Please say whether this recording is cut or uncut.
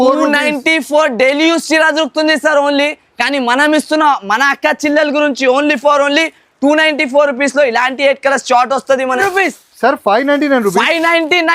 cut